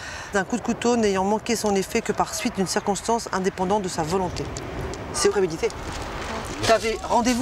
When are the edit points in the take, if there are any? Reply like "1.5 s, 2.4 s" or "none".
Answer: 5.1 s